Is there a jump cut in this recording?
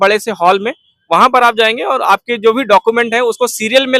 no; 0 cuts

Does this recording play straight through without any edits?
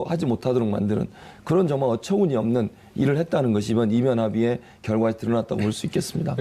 no; 1 cut; at 2.0 s

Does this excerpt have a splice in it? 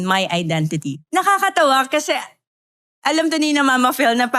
yes; 1 cut; at 1.0 s

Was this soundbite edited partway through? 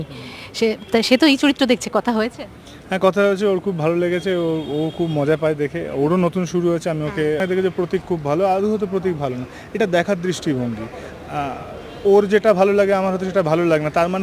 yes; 1 cut; at 7.4 s

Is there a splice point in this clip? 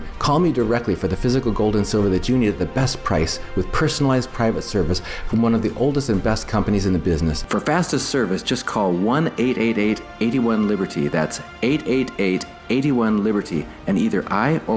no; 0 cuts

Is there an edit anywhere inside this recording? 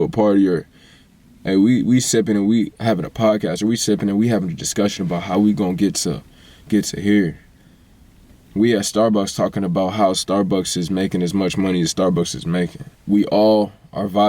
yes; 1 cut; at 12.9 s

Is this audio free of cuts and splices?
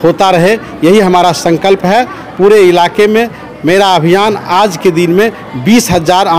yes; 0 cuts

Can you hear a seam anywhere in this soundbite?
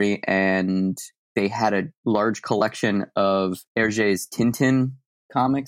yes; 3 cuts; at 1.2 s, 1.9 s, 3.6 s

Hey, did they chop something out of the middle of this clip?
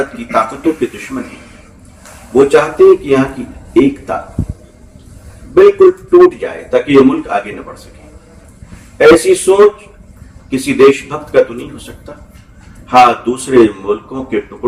no; 0 cuts

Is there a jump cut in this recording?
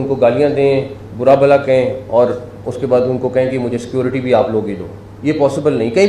no; 0 cuts

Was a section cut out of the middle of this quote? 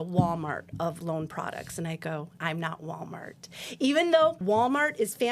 yes; 3 cuts; at 1.0 s, 2.3 s, 4.4 s

